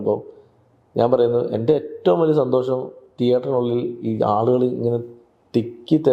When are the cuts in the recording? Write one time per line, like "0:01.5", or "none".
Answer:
none